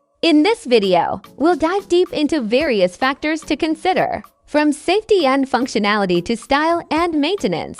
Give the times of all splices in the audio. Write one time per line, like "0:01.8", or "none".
none